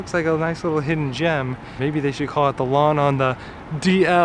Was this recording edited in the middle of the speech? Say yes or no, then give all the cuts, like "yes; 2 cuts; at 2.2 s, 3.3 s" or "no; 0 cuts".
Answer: yes; 1 cut; at 1.7 s